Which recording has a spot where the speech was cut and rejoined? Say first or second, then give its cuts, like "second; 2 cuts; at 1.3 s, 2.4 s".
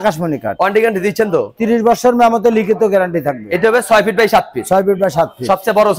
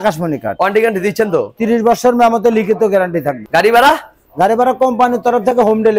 second; 1 cut; at 3.4 s